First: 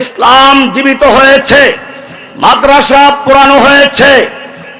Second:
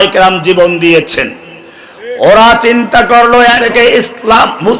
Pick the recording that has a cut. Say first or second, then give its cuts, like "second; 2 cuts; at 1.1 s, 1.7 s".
second; 1 cut; at 3.6 s